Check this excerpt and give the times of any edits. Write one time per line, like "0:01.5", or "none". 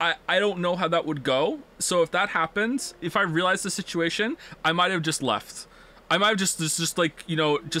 0:01.7
0:03.0